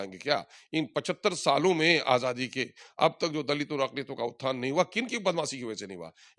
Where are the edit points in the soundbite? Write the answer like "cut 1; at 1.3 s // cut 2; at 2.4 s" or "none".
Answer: none